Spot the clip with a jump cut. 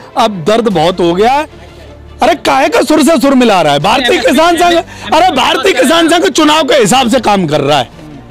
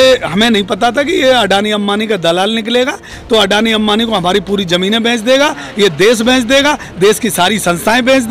first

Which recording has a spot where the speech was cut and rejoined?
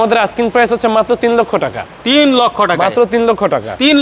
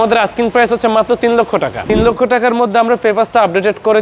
second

